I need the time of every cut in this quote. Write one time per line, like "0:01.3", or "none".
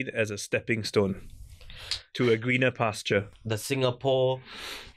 0:03.4